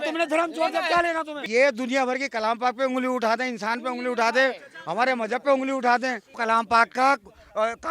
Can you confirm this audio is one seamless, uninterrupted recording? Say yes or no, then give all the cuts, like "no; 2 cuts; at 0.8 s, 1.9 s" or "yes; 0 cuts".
no; 2 cuts; at 1.4 s, 6.3 s